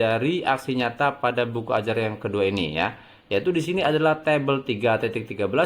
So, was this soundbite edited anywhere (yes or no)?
no